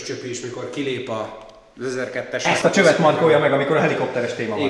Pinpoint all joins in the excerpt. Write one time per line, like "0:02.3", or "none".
0:02.4